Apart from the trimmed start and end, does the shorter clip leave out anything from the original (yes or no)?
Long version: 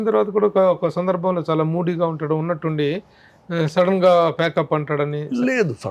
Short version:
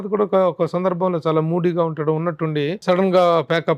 yes